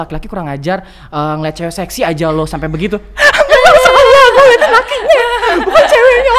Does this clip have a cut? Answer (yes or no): no